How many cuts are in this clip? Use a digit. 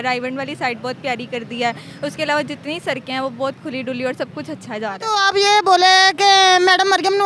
1